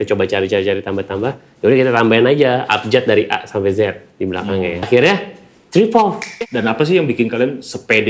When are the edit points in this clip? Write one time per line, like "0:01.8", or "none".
0:04.9
0:06.2

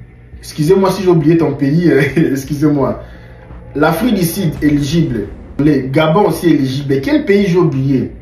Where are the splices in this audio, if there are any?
0:05.5

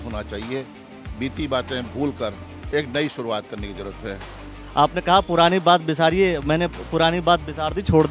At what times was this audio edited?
0:04.6

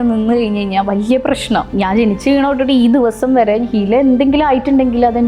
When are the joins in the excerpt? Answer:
0:01.7

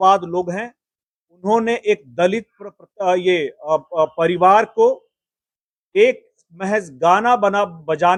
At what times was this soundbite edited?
none

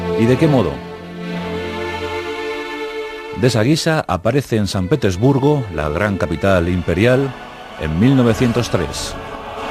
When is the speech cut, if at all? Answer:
none

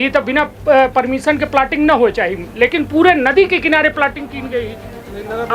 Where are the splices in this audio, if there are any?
none

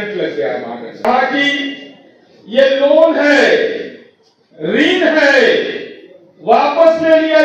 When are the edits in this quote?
0:01.0

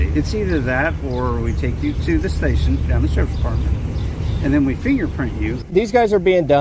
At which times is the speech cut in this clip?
0:05.5

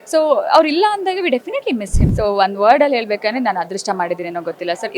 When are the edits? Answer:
0:02.0

